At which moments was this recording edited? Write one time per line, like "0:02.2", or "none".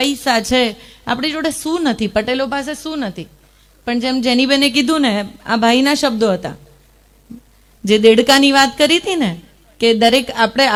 none

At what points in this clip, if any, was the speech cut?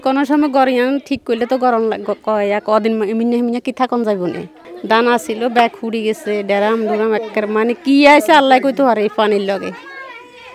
none

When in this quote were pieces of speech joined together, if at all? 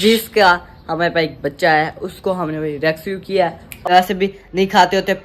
0:03.9

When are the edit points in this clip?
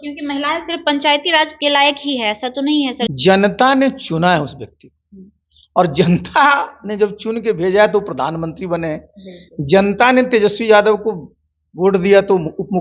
0:01.5
0:03.1

